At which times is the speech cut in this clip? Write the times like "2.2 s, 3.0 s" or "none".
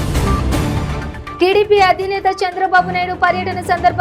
1.2 s